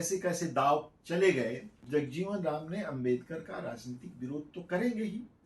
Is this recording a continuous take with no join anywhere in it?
no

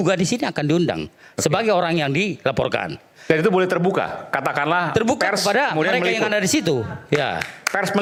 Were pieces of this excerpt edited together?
no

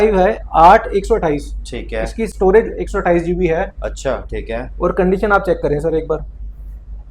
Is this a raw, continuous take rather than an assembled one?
yes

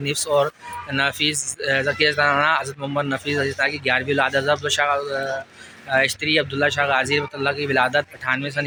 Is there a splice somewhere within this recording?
no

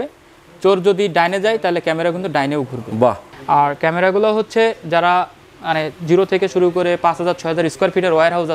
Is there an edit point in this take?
yes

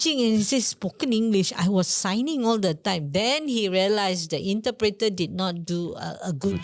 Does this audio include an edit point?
no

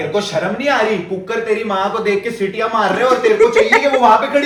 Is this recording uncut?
yes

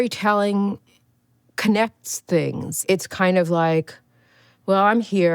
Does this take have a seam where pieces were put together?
yes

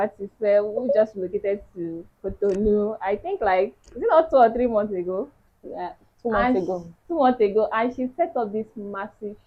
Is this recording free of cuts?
yes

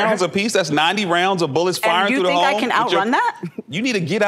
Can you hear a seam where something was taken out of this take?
no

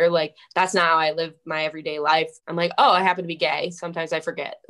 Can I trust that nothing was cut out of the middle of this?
no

